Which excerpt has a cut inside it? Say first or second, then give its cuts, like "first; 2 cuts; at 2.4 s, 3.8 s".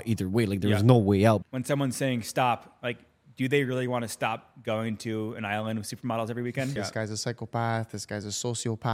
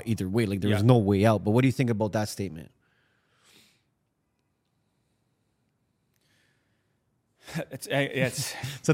first; 2 cuts; at 1.4 s, 6.7 s